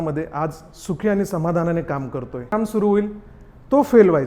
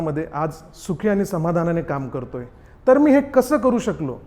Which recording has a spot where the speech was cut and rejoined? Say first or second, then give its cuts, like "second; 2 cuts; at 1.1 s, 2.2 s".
first; 1 cut; at 2.5 s